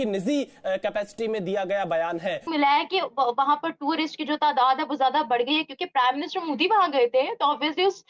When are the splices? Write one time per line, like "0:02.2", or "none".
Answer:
0:02.4